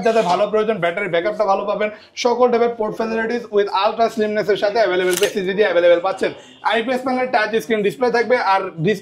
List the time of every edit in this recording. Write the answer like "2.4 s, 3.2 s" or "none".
5.3 s